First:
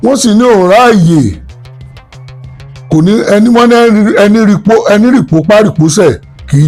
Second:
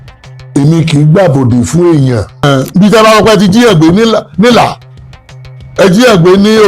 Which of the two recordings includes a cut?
second; 1 cut; at 2.4 s

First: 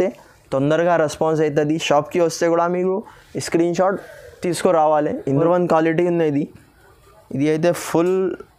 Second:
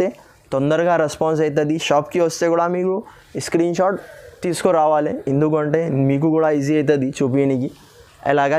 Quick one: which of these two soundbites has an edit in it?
first; 1 cut; at 5.4 s

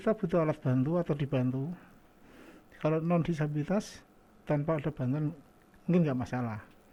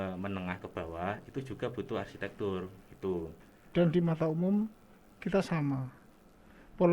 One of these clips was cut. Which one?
second; 1 cut; at 3.4 s

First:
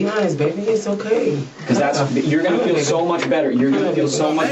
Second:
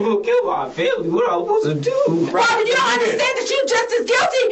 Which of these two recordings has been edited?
second; 1 cut; at 2.3 s

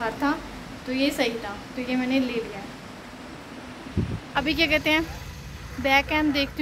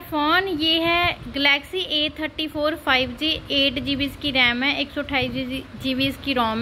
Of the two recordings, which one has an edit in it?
first; 1 cut; at 4.4 s

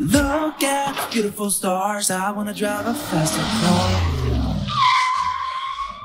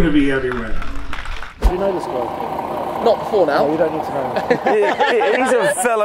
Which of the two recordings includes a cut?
second; 1 cut; at 1.6 s

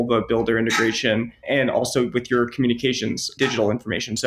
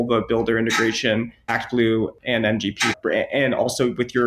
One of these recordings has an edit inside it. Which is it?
first; 2 cuts; at 1.4 s, 3.3 s

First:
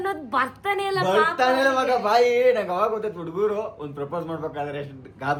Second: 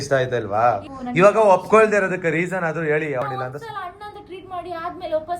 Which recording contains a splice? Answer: second; 2 cuts; at 0.9 s, 3.2 s

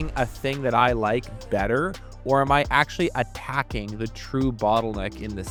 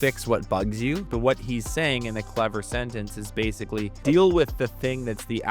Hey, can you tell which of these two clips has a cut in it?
second; 2 cuts; at 1.1 s, 3.9 s

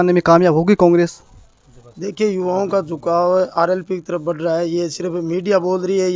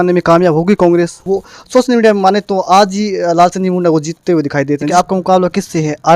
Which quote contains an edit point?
second; 2 cuts; at 1.2 s, 4.8 s

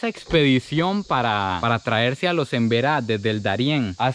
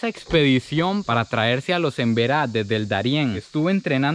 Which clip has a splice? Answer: second; 2 cuts; at 1.1 s, 3.4 s

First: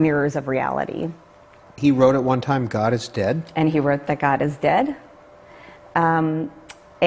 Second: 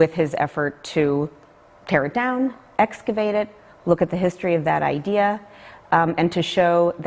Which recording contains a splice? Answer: second; 1 cut; at 6.0 s

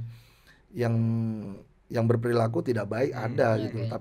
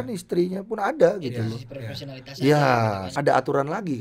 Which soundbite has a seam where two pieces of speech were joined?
second; 1 cut; at 3.1 s

